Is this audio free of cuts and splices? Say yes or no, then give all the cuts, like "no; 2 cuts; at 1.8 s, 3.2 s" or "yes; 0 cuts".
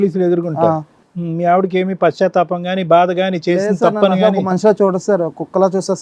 no; 1 cut; at 0.9 s